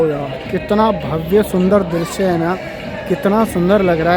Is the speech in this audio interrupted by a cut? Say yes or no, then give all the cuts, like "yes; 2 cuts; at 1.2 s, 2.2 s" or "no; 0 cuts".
no; 0 cuts